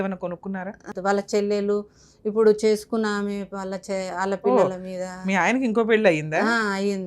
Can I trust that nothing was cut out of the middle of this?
no; 1 cut; at 0.9 s

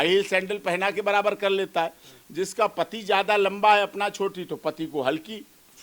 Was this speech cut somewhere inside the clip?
no; 0 cuts

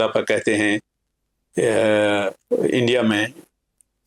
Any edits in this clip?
no; 0 cuts

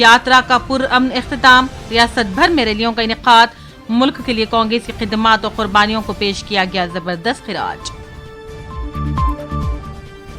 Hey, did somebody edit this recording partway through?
no; 0 cuts

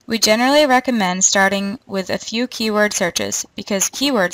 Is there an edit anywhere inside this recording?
yes; 1 cut; at 1.8 s

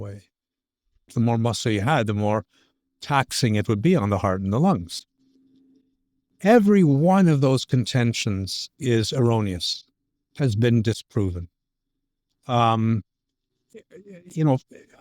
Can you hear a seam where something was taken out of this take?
yes; 1 cut; at 1.1 s

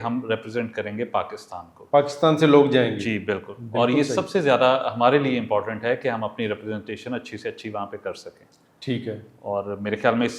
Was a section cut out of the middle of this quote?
no; 0 cuts

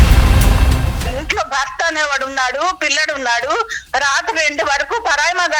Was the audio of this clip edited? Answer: yes; 1 cut; at 1.0 s

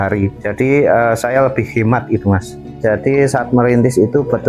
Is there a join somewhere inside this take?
yes; 1 cut; at 2.6 s

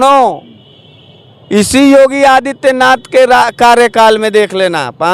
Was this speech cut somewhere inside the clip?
no; 0 cuts

